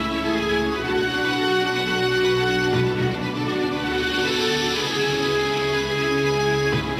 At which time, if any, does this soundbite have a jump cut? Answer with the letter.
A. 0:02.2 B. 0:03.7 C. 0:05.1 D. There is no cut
D